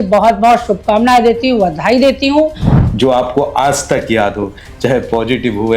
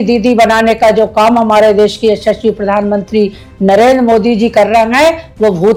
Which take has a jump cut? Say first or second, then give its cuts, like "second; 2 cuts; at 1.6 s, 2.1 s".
first; 1 cut; at 2.7 s